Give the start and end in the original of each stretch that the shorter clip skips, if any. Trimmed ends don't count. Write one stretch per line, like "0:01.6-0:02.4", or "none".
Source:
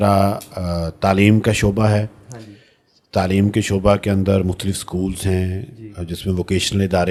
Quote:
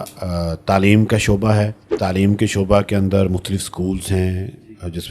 0:02.2-0:03.0